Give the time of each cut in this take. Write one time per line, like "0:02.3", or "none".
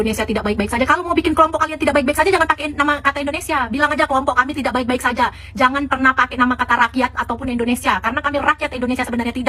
none